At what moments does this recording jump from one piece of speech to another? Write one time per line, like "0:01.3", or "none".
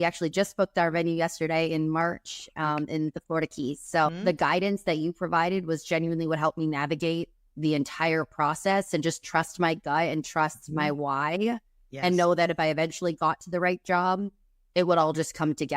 0:04.2